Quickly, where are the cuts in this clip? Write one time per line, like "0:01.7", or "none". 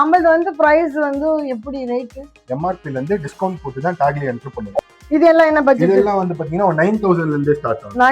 0:04.8